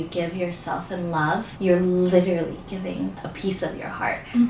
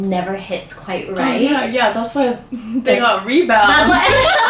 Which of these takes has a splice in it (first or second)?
first